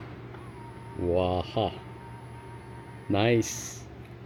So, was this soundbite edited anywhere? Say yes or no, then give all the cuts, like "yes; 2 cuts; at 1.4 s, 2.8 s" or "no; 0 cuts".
no; 0 cuts